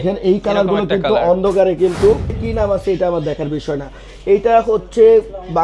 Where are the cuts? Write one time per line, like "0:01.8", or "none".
0:02.4

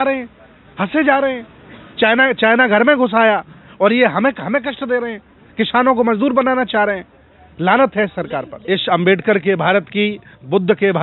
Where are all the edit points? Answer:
0:08.5

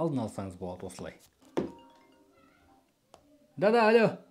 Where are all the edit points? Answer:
0:01.4

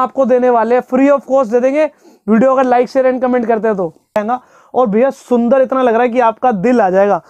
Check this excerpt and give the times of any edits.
0:04.2

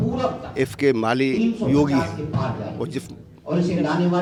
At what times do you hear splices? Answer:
none

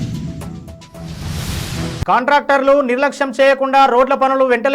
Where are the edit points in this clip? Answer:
0:01.9

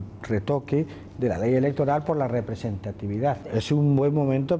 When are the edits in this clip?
0:03.4

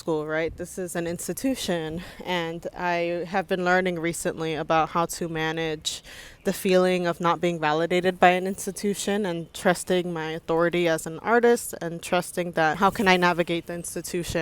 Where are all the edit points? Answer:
0:12.8

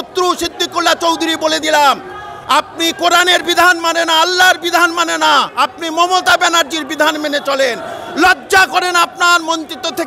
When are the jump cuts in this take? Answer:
none

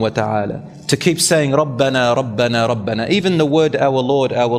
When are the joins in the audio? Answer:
none

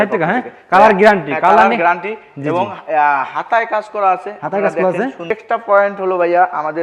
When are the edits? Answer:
0:05.3

